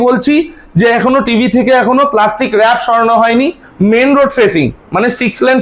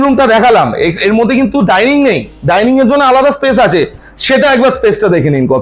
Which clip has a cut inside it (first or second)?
first